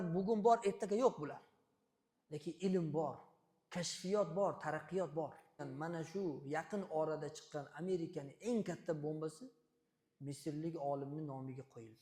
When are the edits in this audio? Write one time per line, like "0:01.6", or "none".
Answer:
0:05.6